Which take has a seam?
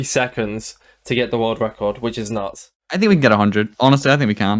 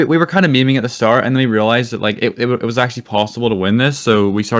first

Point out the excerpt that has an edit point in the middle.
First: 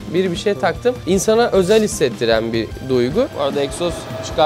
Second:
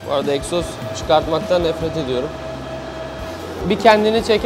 second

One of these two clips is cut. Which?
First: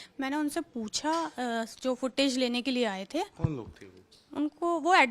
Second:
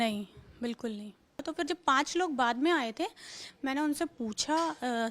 second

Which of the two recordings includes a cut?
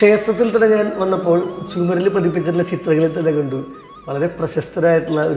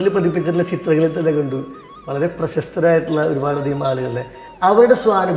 second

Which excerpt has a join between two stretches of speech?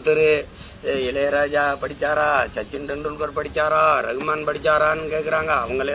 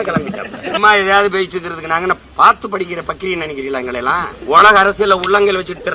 second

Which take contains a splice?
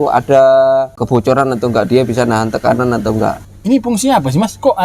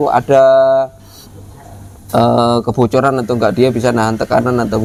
first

